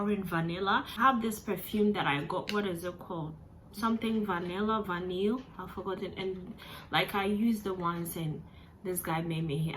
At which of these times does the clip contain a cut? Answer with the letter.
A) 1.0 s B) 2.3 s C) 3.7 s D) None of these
A